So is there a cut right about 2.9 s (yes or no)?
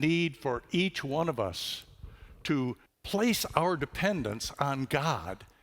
yes